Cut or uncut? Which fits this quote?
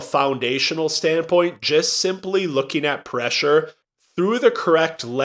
uncut